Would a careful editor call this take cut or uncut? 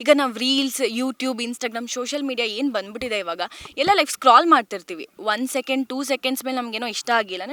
uncut